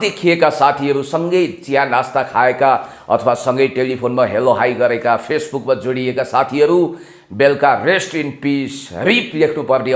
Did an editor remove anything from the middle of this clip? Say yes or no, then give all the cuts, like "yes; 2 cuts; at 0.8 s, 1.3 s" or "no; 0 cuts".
no; 0 cuts